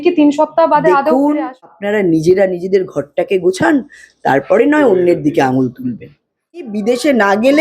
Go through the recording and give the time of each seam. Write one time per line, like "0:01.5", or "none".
0:01.7
0:06.6

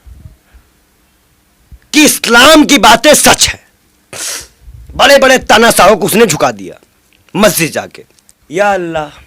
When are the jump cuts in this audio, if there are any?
0:08.1

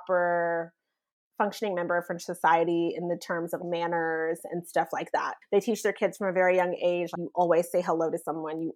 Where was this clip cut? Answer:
none

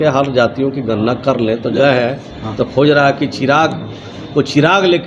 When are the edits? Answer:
0:01.8

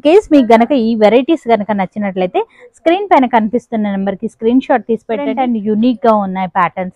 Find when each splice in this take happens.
0:05.3

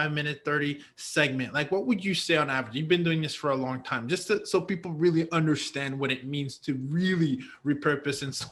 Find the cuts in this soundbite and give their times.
none

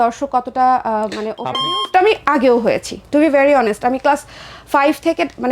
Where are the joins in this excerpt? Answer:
0:01.4

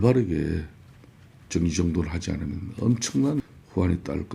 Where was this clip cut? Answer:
0:03.4

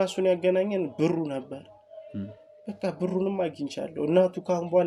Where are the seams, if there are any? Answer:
none

